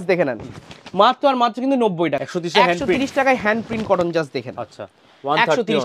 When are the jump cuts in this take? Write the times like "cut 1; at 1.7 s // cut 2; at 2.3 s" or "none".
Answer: cut 1; at 2.3 s